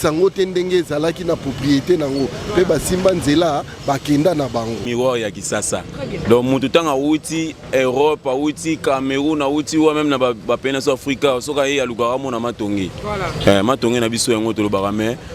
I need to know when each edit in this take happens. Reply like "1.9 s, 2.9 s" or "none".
4.9 s